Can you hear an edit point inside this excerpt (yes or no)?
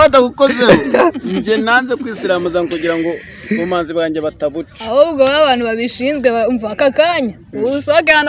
no